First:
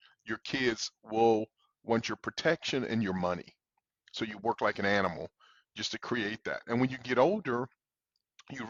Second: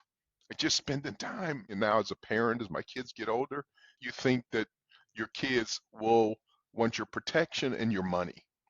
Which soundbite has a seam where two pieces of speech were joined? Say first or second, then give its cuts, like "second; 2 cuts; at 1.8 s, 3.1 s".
second; 2 cuts; at 1.7 s, 3.9 s